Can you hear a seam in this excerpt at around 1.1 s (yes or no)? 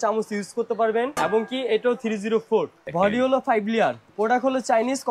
yes